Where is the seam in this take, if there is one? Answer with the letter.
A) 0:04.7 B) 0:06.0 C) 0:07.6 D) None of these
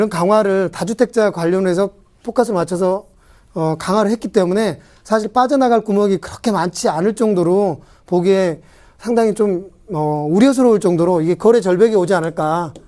A